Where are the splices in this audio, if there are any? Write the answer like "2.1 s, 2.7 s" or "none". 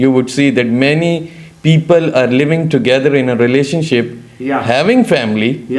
none